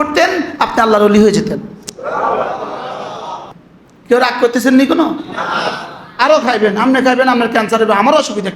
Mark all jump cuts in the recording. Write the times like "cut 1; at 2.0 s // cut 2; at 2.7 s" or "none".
cut 1; at 3.6 s